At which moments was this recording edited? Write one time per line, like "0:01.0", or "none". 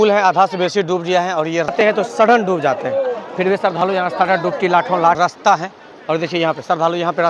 0:01.7
0:05.2